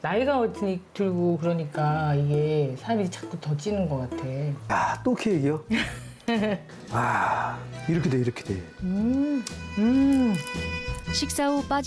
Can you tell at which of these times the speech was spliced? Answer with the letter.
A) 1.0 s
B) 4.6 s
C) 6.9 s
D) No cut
B